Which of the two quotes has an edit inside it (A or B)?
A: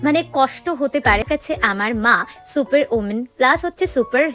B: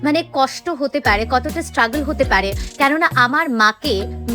A